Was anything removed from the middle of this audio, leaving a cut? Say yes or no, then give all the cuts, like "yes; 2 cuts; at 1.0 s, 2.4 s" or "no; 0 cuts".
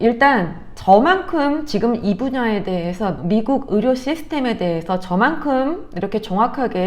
no; 0 cuts